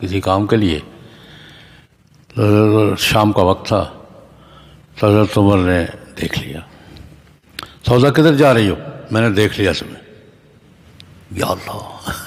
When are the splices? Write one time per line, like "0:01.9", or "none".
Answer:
none

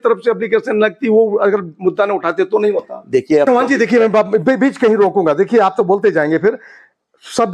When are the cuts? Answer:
0:03.5

